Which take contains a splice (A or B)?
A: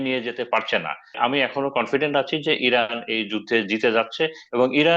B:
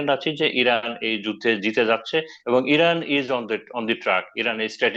A